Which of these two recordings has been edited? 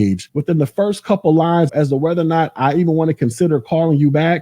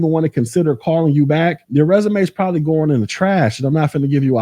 first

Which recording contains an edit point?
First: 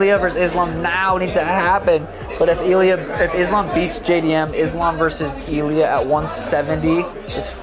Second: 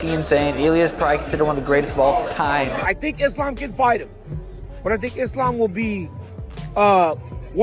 second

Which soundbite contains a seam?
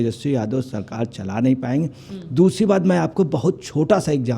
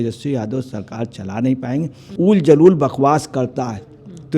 second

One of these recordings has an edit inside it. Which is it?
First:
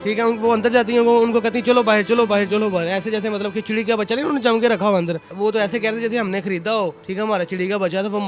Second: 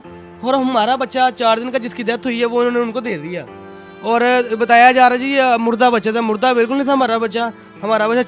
first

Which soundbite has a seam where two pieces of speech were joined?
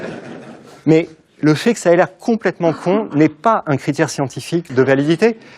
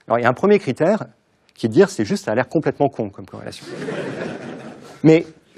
first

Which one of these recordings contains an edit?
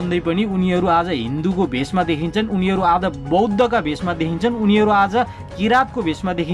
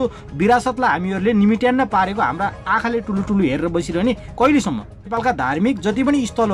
second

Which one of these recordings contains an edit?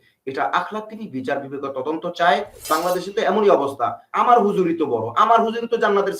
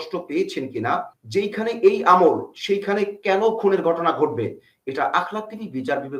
first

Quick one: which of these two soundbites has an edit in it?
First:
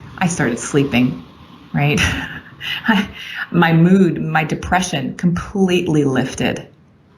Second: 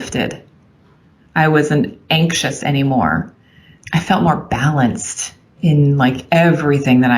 second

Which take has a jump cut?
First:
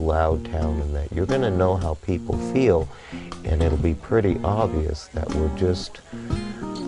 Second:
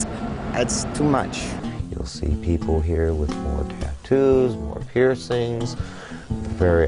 first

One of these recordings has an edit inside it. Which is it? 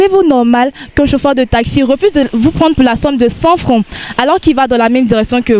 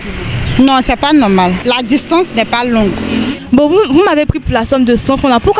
second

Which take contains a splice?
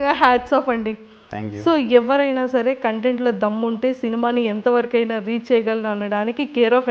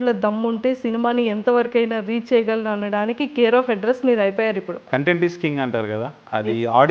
second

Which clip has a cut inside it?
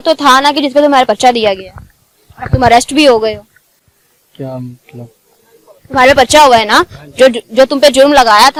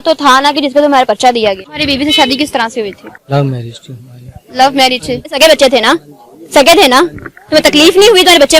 second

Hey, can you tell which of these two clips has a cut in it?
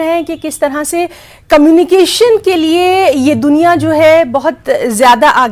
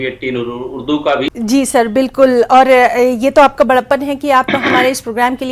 second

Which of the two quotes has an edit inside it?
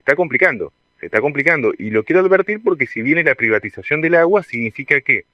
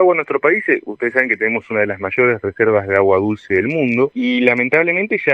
second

